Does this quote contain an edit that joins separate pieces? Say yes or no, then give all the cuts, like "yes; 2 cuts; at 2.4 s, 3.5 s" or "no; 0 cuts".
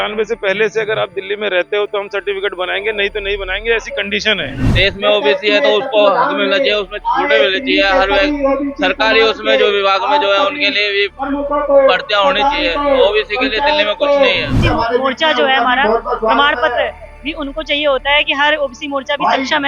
yes; 2 cuts; at 4.7 s, 14.6 s